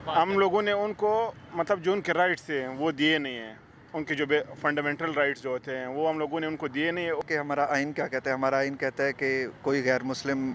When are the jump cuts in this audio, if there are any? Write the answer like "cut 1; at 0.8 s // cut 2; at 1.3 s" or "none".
cut 1; at 7.2 s